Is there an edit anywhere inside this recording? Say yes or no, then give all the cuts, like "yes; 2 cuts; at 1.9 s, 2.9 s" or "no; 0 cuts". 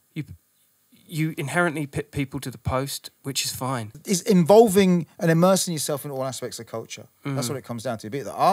yes; 1 cut; at 4.0 s